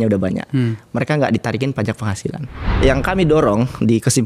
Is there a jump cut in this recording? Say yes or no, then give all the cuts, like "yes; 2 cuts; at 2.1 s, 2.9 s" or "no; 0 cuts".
yes; 1 cut; at 2.6 s